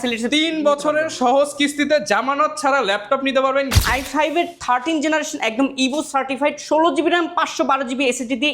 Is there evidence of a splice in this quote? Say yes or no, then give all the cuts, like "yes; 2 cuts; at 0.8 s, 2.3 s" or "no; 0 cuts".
yes; 1 cut; at 3.7 s